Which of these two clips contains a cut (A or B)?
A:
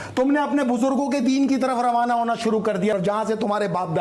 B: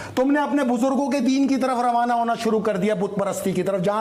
A